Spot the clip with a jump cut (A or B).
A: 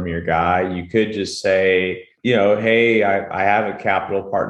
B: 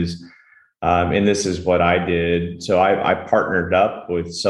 A